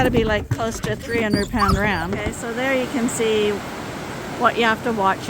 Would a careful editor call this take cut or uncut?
cut